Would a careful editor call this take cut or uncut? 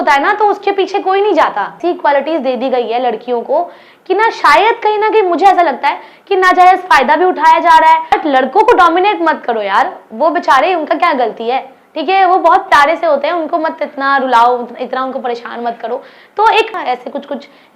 cut